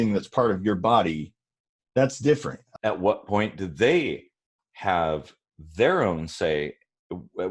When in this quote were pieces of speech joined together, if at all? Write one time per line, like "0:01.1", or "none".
0:02.6